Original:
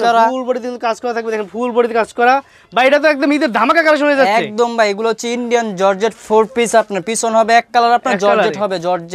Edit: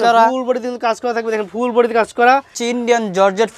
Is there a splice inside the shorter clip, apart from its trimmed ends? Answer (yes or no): yes